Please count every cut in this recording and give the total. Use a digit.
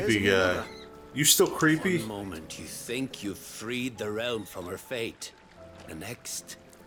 0